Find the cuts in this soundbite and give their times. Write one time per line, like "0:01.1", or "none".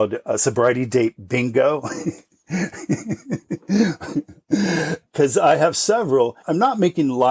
0:05.1
0:06.4

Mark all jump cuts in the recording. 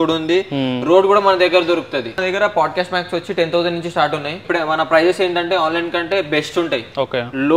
0:02.2
0:04.4

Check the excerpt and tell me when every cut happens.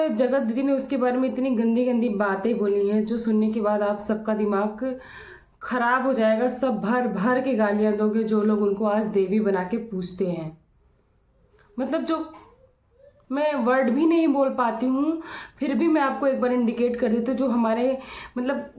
none

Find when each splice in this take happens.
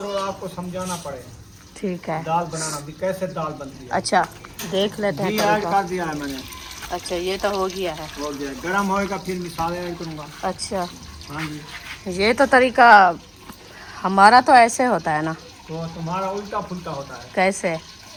none

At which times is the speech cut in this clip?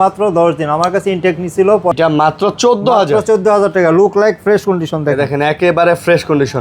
0:01.9

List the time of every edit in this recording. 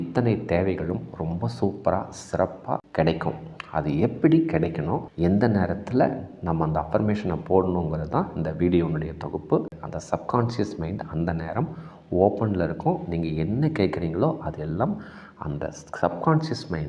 0:09.7

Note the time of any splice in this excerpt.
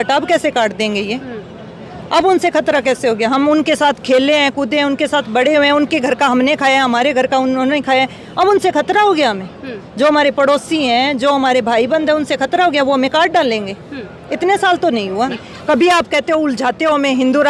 0:15.4

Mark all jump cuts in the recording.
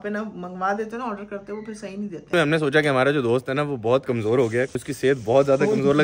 0:02.3
0:04.8

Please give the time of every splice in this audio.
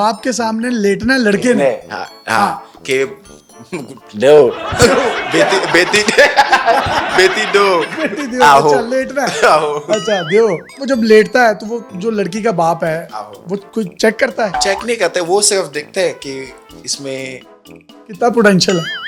none

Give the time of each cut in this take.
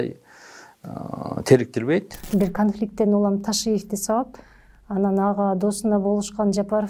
0:02.2

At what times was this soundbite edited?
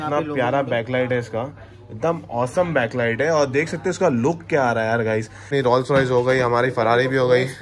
none

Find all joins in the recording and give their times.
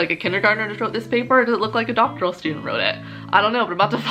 none

